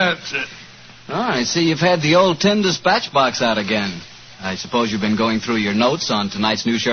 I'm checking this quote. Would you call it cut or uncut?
cut